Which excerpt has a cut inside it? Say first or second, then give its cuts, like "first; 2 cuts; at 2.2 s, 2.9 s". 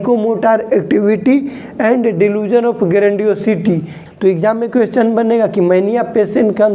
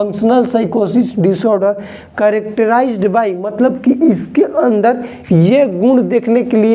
first; 1 cut; at 4.0 s